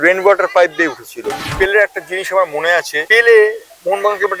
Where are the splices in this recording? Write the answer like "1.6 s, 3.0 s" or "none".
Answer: 1.5 s, 3.0 s